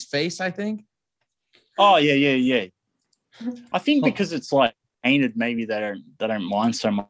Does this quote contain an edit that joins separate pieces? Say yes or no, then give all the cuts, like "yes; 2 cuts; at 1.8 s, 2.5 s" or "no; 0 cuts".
no; 0 cuts